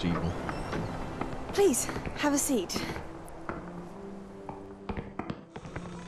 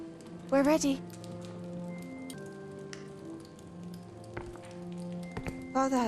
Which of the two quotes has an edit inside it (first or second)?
second